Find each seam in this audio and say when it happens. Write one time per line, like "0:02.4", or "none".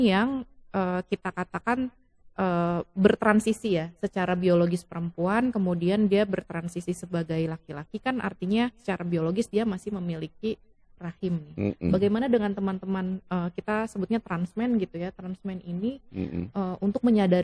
none